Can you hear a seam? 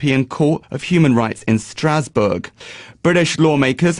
yes; 1 cut; at 2.8 s

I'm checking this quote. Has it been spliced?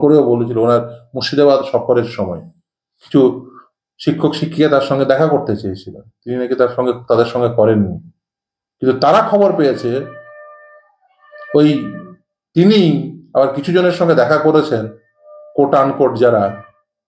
no; 0 cuts

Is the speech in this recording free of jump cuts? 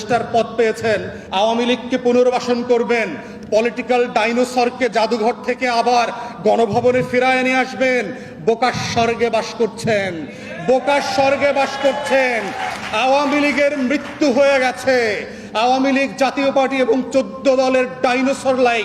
no; 1 cut; at 1.2 s

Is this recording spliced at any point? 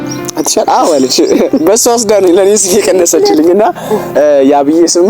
no; 0 cuts

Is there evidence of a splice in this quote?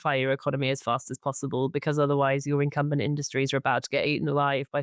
no; 0 cuts

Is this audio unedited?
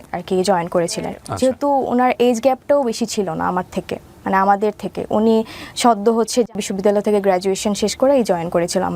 no; 2 cuts; at 1.2 s, 6.6 s

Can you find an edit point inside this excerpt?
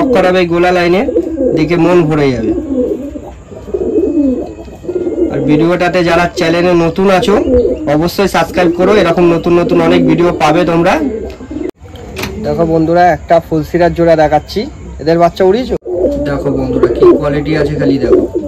yes; 2 cuts; at 11.7 s, 15.9 s

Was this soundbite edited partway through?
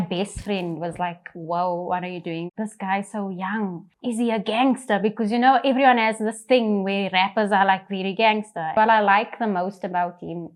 no; 0 cuts

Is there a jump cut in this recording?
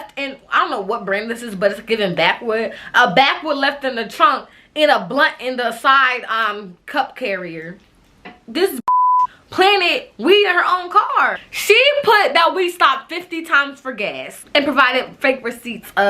yes; 3 cuts; at 8.4 s, 11.5 s, 14.4 s

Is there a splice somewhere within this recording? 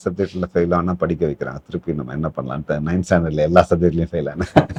no; 0 cuts

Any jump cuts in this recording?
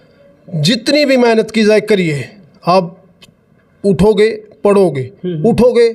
no; 0 cuts

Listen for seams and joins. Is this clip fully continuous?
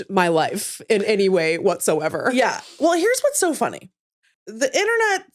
no; 1 cut; at 4.4 s

